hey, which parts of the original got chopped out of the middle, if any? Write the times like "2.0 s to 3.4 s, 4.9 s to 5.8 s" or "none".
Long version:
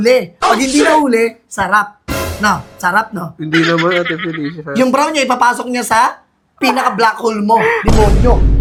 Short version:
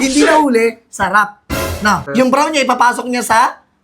2.6 s to 4.7 s